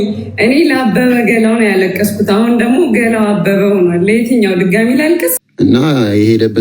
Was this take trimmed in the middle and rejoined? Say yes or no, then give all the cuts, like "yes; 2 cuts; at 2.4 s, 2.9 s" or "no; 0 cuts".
yes; 1 cut; at 5.4 s